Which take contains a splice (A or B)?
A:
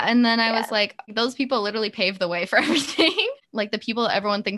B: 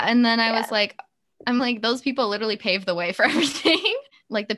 A